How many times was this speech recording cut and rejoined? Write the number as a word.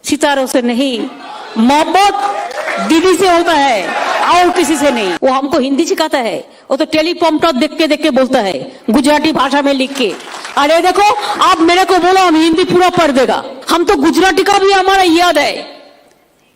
two